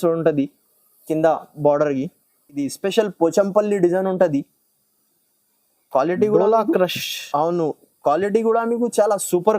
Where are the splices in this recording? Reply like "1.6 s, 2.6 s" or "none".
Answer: 2.7 s